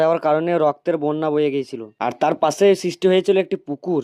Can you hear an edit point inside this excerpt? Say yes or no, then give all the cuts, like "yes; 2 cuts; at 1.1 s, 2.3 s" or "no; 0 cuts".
no; 0 cuts